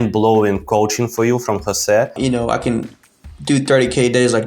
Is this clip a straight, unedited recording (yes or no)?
no